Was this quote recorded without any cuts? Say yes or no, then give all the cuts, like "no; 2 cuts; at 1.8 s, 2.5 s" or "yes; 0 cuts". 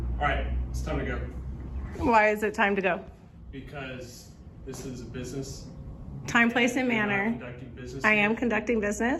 yes; 0 cuts